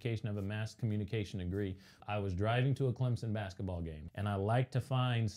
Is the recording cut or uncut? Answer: cut